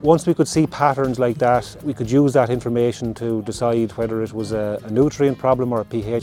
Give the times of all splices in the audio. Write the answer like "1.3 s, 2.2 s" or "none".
1.7 s